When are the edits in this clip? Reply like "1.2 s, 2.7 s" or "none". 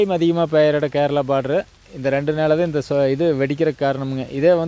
none

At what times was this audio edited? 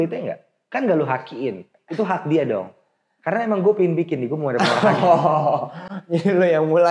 none

